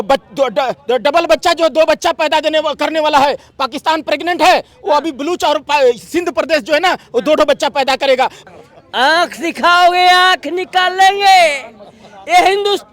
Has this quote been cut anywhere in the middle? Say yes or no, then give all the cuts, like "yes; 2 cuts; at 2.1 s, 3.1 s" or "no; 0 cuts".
yes; 1 cut; at 8.4 s